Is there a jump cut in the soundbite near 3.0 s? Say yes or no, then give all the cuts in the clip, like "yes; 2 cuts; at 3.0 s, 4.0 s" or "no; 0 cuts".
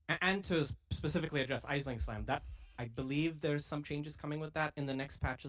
no; 1 cut; at 1.2 s